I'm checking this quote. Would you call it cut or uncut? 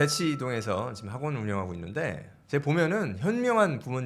uncut